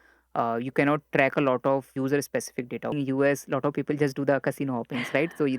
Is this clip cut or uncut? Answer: cut